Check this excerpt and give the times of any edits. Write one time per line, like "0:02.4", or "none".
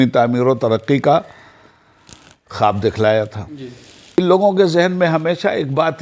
0:04.2